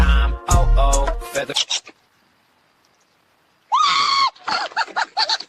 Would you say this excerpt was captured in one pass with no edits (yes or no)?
no